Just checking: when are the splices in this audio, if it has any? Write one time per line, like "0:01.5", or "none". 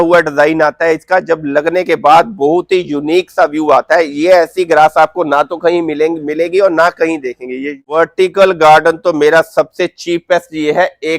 0:07.8